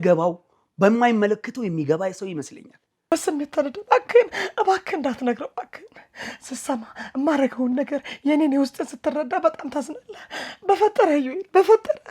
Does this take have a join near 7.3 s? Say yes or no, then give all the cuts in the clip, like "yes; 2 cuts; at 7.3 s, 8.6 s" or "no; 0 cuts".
no; 1 cut; at 3.1 s